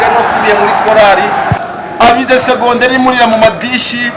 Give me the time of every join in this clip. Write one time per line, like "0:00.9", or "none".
0:01.6